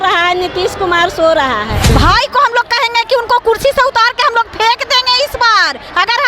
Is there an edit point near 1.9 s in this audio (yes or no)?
yes